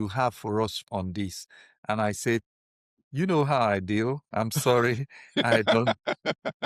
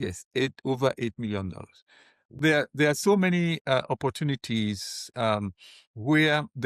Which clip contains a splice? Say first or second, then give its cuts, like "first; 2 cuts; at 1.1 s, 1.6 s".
second; 1 cut; at 2.4 s